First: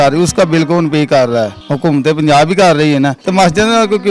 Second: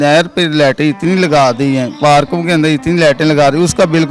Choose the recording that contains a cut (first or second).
first